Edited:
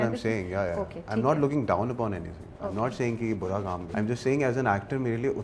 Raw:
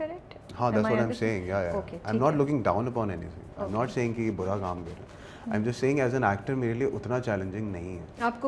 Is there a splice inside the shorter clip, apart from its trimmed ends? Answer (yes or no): yes